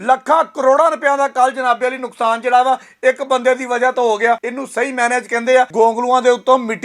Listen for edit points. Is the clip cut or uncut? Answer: cut